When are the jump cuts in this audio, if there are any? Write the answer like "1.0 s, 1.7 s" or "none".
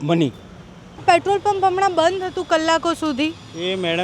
1.0 s

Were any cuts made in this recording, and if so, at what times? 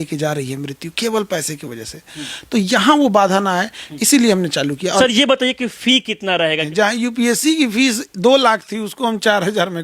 5.0 s, 6.6 s

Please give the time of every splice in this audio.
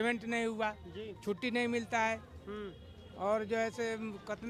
none

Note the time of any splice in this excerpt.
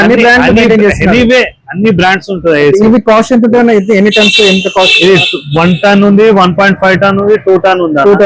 none

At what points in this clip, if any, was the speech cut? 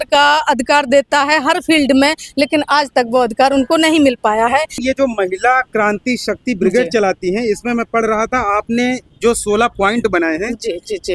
none

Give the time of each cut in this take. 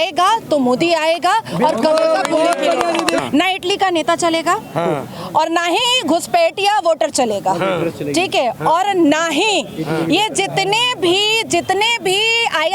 3.2 s

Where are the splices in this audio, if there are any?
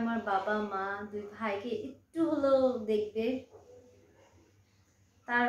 none

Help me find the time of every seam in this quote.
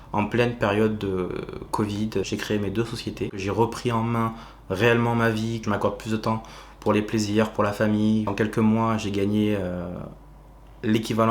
2.3 s, 3.4 s, 5.6 s, 8.3 s

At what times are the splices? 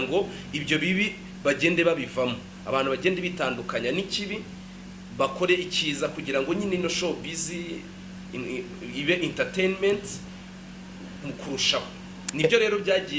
none

